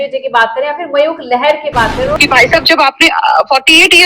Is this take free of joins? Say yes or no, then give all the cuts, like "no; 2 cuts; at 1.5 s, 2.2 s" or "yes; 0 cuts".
no; 1 cut; at 2.2 s